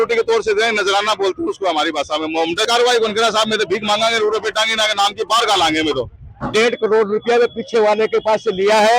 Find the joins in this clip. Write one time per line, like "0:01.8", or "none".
0:02.7
0:06.5